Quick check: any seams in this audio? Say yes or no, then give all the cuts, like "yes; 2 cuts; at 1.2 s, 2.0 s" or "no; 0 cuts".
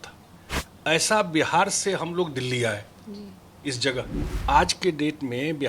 yes; 1 cut; at 4.2 s